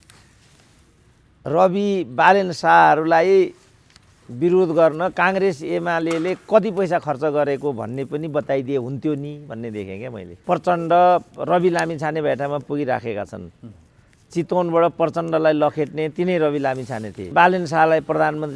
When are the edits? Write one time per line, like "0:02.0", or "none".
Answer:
0:10.3
0:17.3